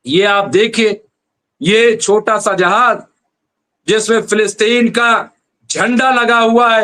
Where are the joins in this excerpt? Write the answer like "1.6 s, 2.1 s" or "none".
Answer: none